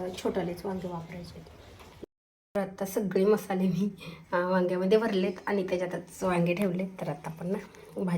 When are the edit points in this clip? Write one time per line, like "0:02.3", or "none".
0:02.0

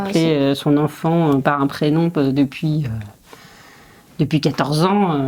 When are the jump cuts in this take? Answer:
none

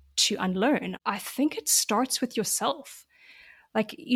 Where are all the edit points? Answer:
0:00.9

